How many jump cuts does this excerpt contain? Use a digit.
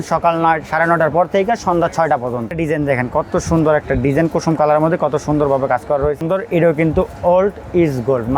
2